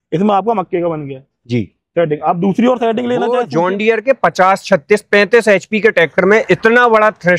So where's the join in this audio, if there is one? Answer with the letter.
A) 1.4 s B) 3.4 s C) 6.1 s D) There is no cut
B